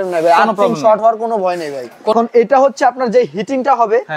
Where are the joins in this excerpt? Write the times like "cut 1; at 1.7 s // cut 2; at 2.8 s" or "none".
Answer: cut 1; at 2.1 s